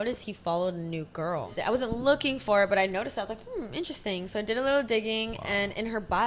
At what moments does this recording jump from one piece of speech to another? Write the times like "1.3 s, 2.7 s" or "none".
1.5 s